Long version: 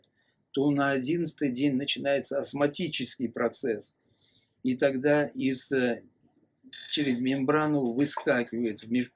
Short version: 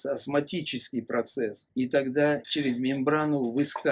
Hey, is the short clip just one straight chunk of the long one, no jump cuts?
no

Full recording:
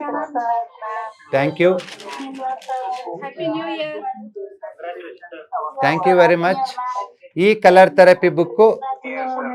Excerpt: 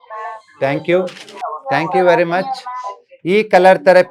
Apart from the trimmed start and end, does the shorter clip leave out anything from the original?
yes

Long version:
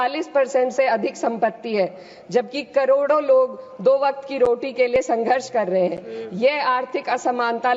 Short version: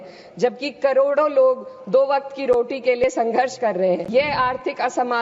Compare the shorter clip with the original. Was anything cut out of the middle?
yes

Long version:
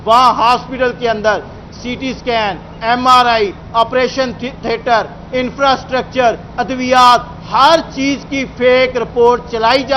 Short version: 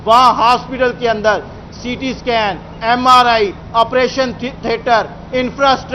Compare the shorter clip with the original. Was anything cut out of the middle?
no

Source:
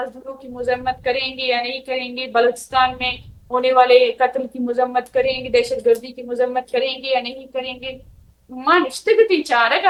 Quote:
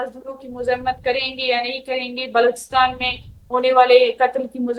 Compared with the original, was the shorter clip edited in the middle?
no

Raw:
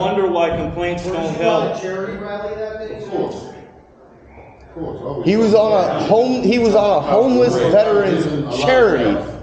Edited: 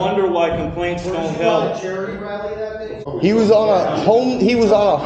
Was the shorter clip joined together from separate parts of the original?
yes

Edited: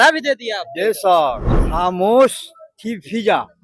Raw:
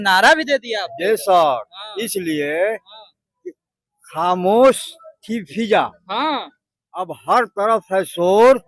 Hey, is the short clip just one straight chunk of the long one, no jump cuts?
no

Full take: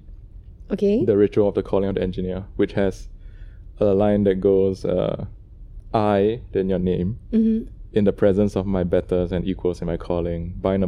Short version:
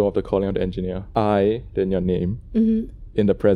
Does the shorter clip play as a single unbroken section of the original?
no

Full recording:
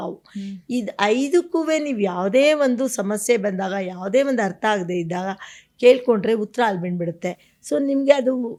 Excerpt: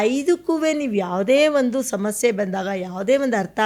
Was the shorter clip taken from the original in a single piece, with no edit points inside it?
yes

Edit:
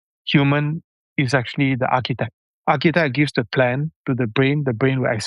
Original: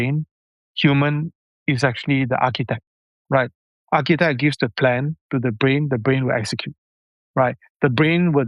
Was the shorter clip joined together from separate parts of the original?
yes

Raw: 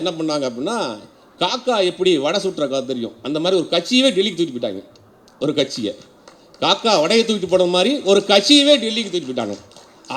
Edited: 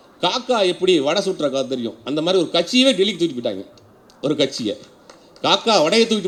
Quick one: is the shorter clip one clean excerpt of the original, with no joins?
yes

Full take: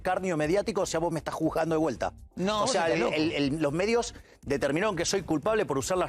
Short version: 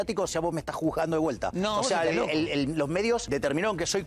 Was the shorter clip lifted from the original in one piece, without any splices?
no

